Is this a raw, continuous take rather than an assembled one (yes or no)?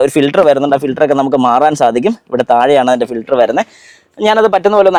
yes